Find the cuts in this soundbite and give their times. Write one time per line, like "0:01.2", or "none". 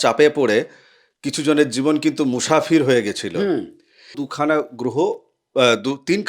0:04.2